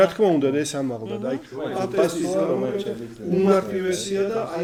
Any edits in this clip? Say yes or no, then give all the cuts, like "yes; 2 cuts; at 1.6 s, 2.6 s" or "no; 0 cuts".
no; 0 cuts